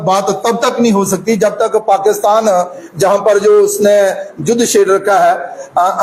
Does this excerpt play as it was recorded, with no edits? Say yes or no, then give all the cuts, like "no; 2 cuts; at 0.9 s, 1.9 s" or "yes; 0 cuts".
yes; 0 cuts